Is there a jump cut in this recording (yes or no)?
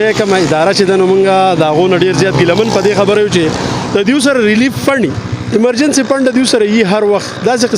yes